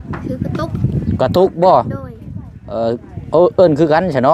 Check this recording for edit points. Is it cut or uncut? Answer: uncut